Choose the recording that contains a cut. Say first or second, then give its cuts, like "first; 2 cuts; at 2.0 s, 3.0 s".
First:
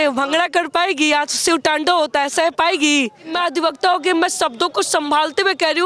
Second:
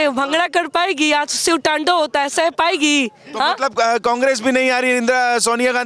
first; 1 cut; at 3.3 s